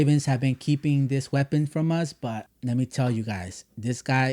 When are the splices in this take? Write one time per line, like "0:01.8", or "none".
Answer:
0:02.5